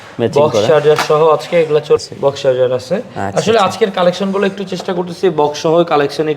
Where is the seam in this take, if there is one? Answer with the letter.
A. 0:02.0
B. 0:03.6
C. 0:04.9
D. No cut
A